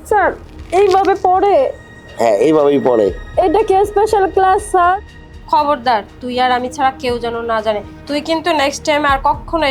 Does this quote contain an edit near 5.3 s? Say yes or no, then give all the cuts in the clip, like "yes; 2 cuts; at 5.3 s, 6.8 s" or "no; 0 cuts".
yes; 2 cuts; at 5.3 s, 7.9 s